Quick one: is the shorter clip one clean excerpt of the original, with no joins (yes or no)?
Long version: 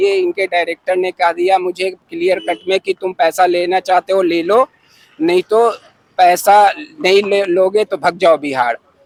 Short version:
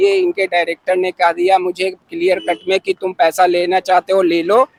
yes